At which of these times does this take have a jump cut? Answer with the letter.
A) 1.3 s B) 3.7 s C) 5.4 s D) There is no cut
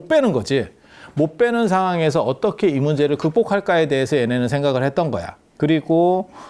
C